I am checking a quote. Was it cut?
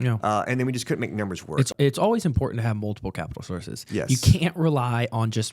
yes; 1 cut; at 1.7 s

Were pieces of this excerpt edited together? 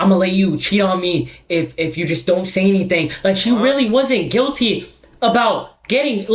no; 0 cuts

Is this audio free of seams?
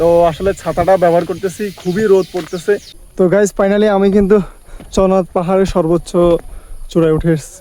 no; 1 cut; at 3.0 s

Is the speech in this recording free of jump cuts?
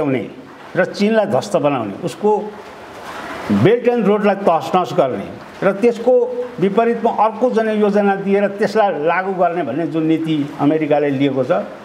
yes; 0 cuts

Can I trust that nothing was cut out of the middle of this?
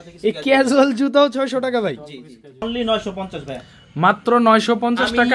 no; 1 cut; at 2.6 s

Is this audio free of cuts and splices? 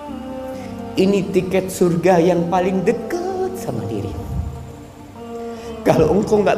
no; 1 cut; at 0.9 s

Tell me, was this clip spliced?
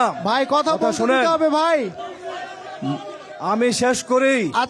no; 0 cuts

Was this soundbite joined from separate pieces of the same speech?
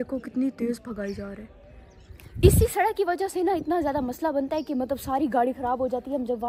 no; 0 cuts

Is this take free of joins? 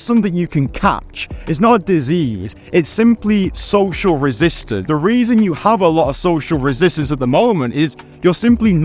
no; 1 cut; at 4.7 s

